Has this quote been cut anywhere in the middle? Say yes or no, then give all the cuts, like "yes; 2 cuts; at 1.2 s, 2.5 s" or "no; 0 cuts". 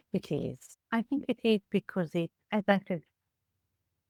no; 0 cuts